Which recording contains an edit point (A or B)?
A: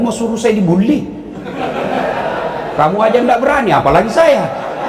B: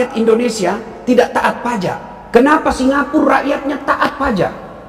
B